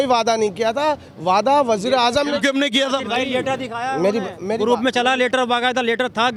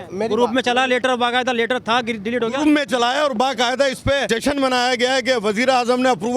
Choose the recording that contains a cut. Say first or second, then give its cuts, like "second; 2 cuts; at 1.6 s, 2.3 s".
second; 1 cut; at 4.3 s